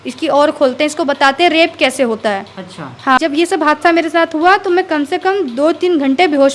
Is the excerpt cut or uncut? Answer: cut